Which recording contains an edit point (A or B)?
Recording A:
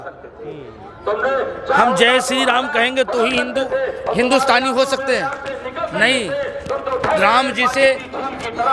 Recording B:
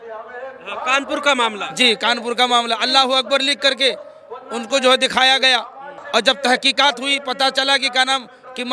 B